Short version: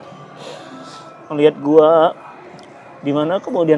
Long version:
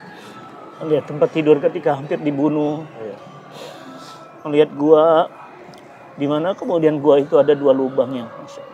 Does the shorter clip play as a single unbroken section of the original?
yes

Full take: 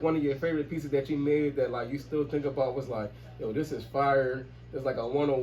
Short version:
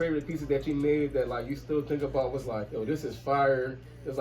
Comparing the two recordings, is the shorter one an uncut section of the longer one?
no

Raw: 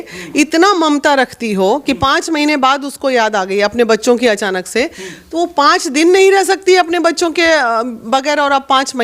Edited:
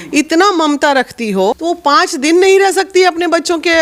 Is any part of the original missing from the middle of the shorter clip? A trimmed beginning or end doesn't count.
yes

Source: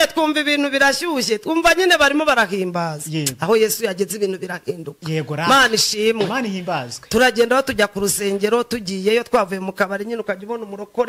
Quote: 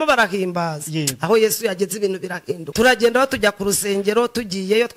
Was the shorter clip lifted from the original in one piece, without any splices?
no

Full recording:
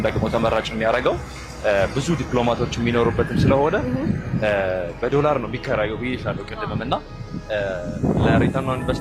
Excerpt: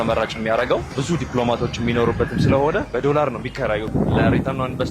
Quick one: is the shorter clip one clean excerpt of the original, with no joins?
no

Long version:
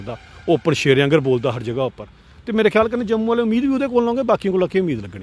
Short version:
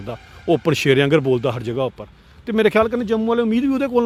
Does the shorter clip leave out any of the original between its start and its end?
no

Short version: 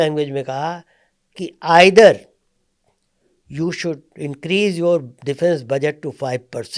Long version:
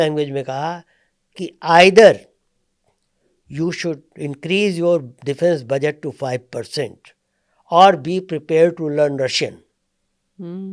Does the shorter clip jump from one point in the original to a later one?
no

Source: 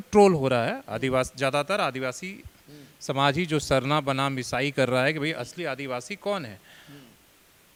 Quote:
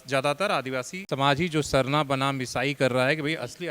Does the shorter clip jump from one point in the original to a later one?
yes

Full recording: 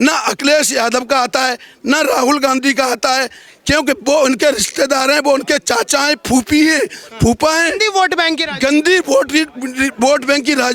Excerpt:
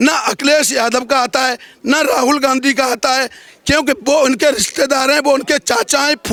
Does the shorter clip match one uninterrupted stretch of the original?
yes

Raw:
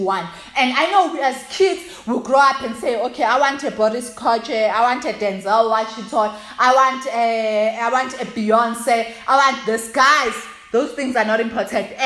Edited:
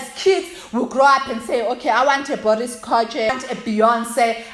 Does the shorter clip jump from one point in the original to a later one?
yes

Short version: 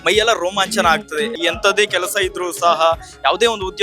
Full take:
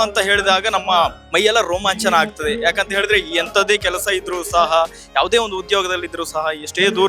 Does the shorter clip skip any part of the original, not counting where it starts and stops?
yes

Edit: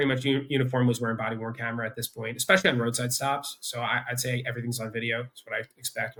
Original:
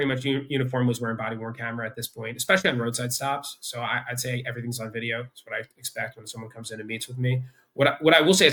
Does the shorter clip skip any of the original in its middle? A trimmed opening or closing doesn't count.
no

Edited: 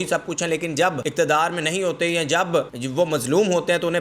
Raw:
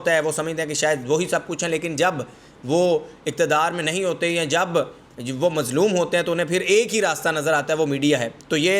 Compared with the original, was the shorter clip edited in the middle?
yes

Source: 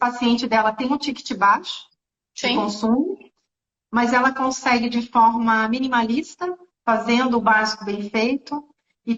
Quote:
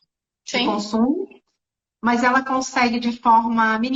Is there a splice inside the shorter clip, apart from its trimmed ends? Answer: no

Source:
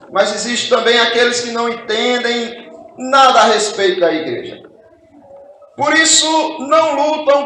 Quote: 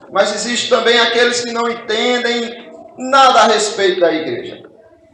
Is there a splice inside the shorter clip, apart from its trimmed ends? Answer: no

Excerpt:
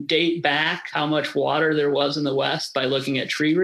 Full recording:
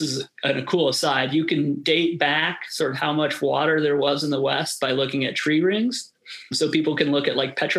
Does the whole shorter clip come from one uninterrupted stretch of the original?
no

